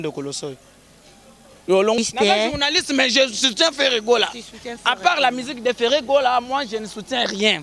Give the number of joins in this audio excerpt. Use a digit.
1